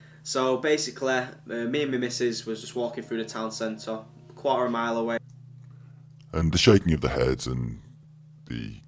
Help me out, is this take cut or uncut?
uncut